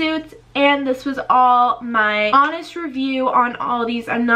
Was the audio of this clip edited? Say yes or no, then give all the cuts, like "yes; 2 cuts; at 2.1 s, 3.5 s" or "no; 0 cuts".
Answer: yes; 1 cut; at 2.3 s